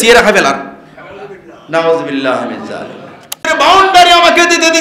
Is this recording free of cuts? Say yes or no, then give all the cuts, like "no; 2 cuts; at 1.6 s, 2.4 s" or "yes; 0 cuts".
no; 1 cut; at 3.5 s